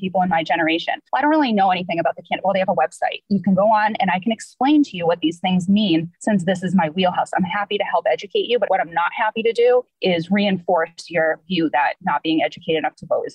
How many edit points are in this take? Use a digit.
2